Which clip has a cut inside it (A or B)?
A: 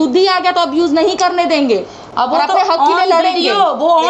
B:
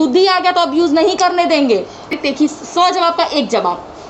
B